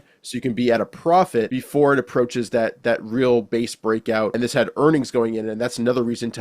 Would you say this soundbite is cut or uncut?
cut